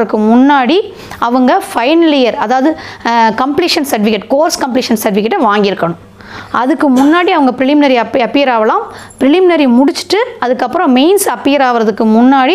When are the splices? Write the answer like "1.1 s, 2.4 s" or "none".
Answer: none

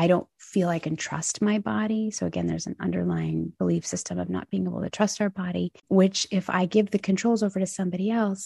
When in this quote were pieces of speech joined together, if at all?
5.8 s

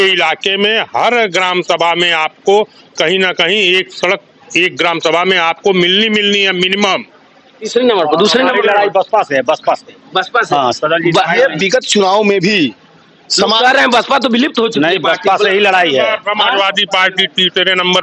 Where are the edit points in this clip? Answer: 7.6 s

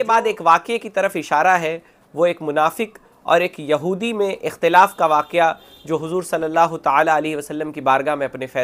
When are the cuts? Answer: none

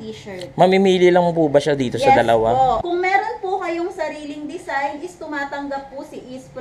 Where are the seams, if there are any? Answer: 2.8 s

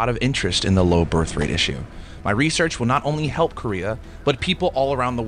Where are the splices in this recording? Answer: none

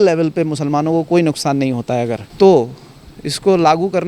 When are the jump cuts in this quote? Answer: 2.2 s

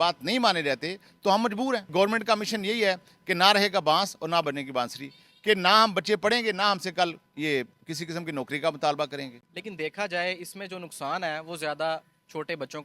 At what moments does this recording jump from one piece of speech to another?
1.8 s, 9.4 s

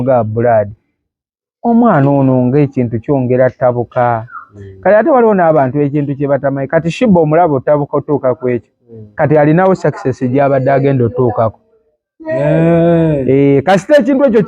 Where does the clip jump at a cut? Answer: none

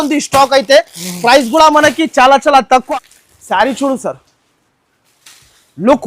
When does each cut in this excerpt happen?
2.9 s

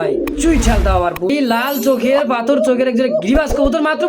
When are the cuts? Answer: 1.3 s

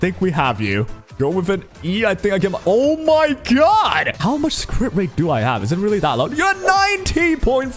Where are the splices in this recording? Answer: 1.0 s, 4.2 s

